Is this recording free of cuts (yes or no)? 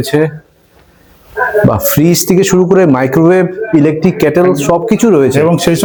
yes